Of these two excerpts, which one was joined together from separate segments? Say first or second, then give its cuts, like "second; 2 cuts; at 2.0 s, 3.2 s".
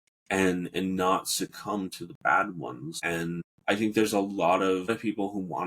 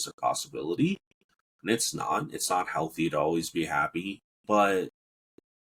first; 2 cuts; at 3.2 s, 4.9 s